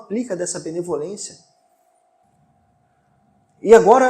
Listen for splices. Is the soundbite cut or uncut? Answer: cut